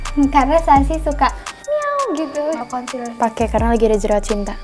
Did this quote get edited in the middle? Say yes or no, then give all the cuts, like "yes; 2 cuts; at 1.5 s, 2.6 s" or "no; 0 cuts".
yes; 1 cut; at 2.6 s